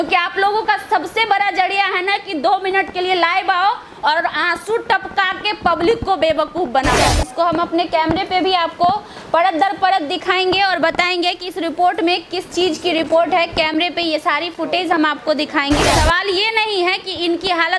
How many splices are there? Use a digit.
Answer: 2